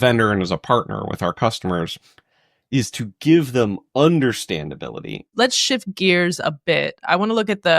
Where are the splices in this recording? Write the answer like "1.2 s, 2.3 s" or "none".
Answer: 5.2 s